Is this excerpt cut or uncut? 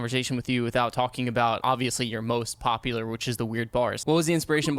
cut